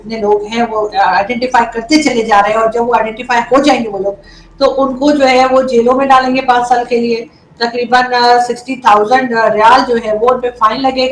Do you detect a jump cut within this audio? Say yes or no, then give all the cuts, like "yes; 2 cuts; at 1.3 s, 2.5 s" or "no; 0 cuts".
no; 0 cuts